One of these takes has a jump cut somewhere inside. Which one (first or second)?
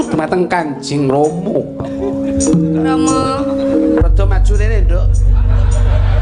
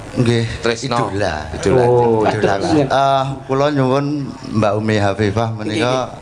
second